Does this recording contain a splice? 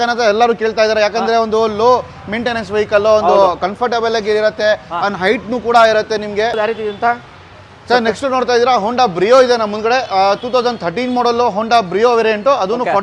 yes; 1 cut; at 6.5 s

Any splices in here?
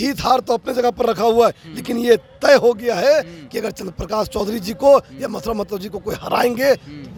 no; 0 cuts

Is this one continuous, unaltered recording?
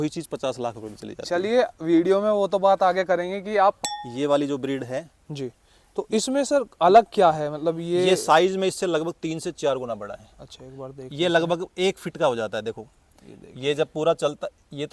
no; 1 cut; at 3.5 s

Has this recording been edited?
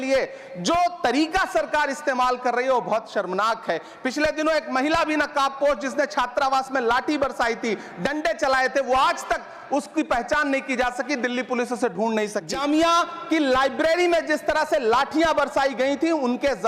yes; 1 cut; at 12.4 s

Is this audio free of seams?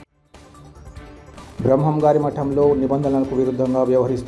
no; 1 cut; at 1.1 s

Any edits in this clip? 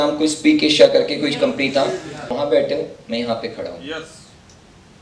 yes; 1 cut; at 2.3 s

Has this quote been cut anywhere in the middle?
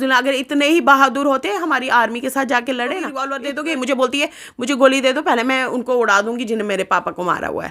yes; 1 cut; at 3.3 s

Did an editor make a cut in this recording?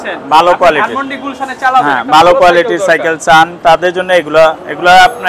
no; 0 cuts

